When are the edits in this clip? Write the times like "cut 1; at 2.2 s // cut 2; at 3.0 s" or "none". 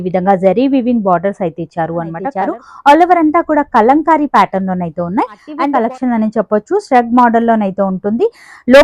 cut 1; at 2.2 s // cut 2; at 5.5 s